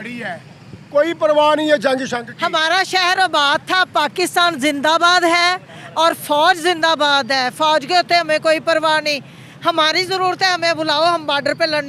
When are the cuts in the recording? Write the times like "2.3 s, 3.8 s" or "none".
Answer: none